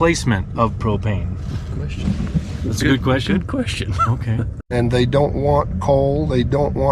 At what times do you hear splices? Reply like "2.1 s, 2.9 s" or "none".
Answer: 4.7 s